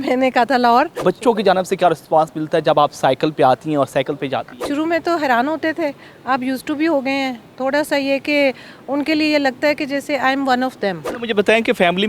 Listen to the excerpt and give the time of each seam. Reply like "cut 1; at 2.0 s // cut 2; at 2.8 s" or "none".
cut 1; at 1.0 s // cut 2; at 4.7 s // cut 3; at 11.1 s

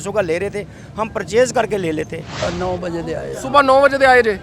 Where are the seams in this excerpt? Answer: cut 1; at 2.2 s

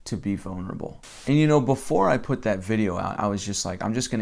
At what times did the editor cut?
none

